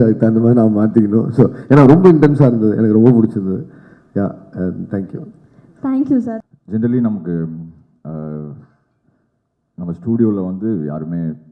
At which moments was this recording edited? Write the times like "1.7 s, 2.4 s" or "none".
6.4 s